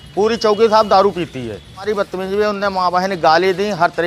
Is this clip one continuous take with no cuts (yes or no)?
no